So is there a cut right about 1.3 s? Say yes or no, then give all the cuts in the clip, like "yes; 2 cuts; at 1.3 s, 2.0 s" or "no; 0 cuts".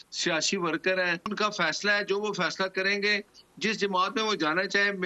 yes; 1 cut; at 1.3 s